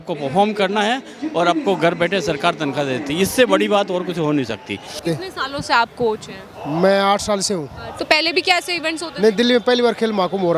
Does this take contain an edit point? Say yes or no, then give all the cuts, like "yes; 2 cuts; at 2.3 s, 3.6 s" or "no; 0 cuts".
yes; 2 cuts; at 5.0 s, 7.9 s